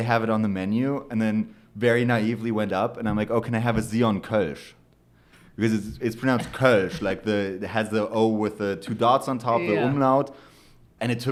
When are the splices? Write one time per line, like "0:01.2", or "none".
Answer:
none